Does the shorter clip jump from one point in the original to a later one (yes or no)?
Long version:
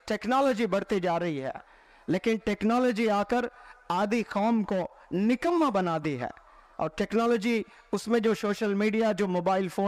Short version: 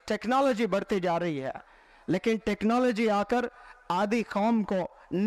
no